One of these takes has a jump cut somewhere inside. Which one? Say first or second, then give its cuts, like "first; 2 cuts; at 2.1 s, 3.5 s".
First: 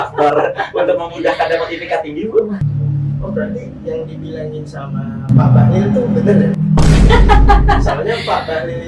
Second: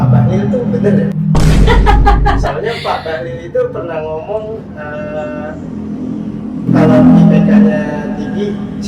first; 1 cut; at 2.6 s